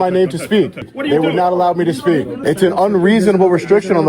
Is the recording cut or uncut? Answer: cut